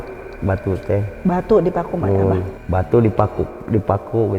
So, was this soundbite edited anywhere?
yes; 1 cut; at 2.6 s

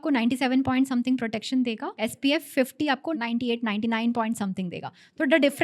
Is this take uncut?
no; 2 cuts; at 1.9 s, 3.1 s

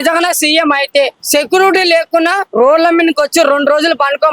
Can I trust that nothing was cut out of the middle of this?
no; 1 cut; at 1.2 s

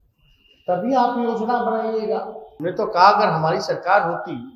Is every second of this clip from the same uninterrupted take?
no; 1 cut; at 2.4 s

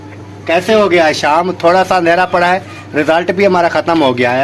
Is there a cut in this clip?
no; 0 cuts

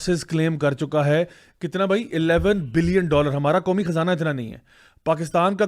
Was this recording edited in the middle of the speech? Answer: no; 0 cuts

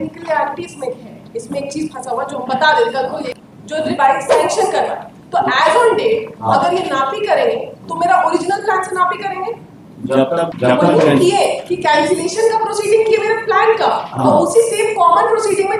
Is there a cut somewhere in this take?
yes; 2 cuts; at 3.3 s, 10.5 s

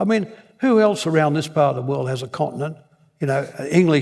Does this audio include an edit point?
no; 0 cuts

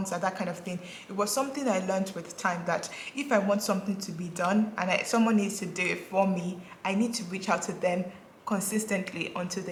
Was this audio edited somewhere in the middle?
no; 0 cuts

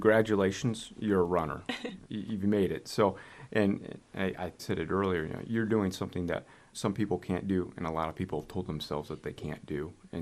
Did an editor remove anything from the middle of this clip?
no; 0 cuts

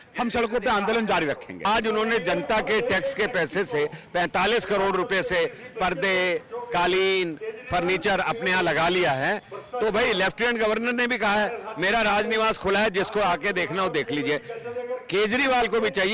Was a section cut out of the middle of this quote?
yes; 1 cut; at 1.6 s

